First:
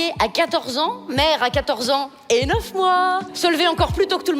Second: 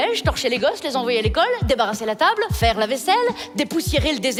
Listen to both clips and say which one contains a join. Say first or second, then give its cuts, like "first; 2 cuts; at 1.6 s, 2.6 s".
first; 1 cut; at 3.3 s